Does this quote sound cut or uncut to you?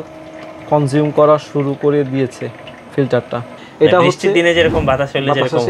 cut